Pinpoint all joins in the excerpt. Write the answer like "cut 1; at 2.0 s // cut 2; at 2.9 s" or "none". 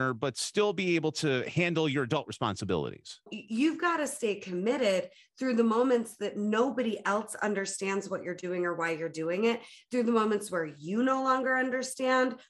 cut 1; at 3.3 s